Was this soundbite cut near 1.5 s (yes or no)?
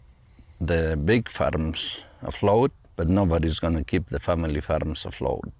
no